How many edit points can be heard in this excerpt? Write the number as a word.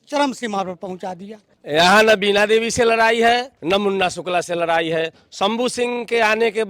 two